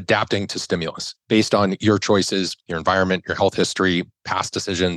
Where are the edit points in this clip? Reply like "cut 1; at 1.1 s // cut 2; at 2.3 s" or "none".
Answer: cut 1; at 1.1 s